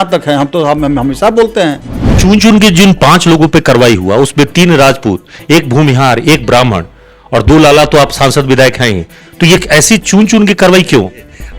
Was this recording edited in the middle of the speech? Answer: yes; 1 cut; at 2.1 s

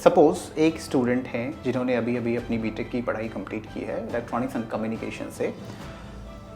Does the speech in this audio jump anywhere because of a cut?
no; 0 cuts

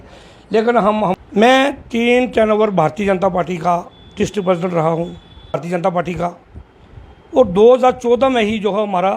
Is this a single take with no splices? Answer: no; 2 cuts; at 1.1 s, 5.6 s

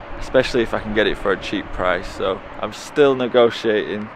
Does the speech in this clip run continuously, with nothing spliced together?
yes; 0 cuts

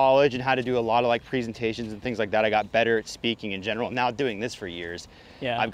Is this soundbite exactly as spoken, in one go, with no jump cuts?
yes; 0 cuts

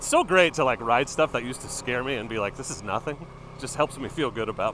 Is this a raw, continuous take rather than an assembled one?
yes; 0 cuts

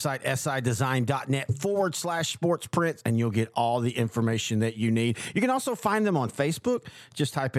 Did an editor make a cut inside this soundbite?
no; 0 cuts

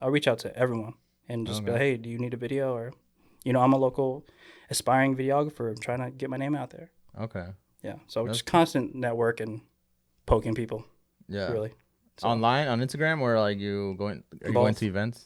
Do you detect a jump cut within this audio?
no; 0 cuts

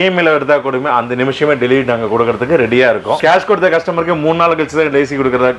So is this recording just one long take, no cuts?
no; 1 cut; at 3.2 s

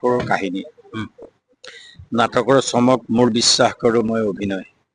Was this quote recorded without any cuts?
yes; 0 cuts

